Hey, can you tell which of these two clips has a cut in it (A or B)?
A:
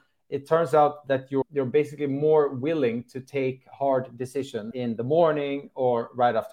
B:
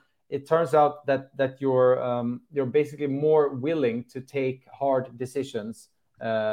A